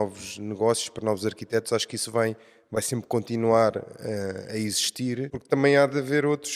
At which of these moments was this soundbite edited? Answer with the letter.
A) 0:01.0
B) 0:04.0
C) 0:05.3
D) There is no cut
C